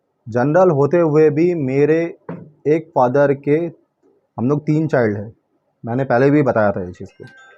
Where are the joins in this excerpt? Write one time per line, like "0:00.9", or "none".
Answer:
none